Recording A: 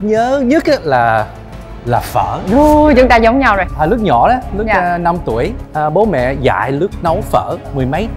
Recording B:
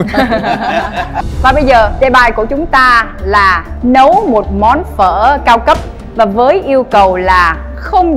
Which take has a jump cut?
B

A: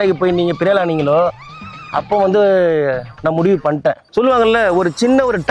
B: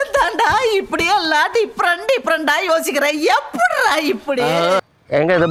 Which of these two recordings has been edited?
A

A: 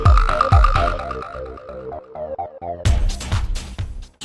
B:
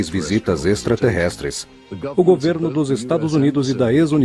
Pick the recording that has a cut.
A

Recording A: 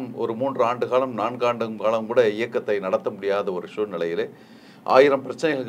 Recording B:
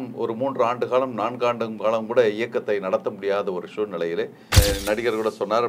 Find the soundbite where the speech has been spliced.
B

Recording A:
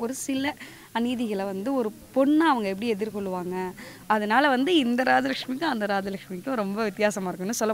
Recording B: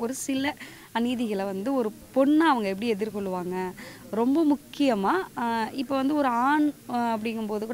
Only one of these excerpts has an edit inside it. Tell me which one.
A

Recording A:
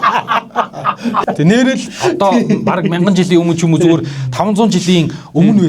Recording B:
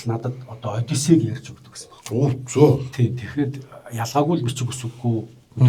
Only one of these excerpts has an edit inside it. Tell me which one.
A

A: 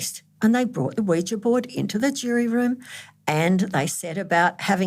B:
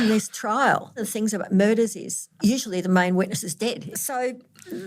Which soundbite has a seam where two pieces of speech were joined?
B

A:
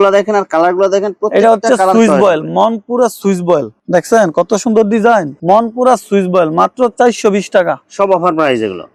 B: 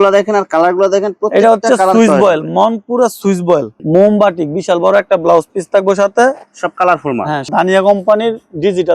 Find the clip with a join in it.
B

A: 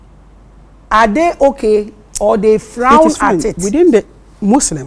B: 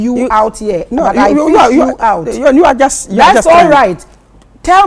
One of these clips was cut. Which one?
A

